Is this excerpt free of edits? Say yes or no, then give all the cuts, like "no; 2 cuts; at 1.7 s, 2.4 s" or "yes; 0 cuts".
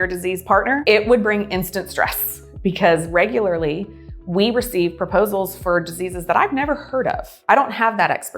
yes; 0 cuts